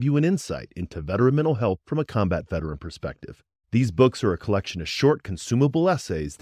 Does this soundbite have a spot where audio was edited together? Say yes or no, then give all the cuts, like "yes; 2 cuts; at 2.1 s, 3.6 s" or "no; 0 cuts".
no; 0 cuts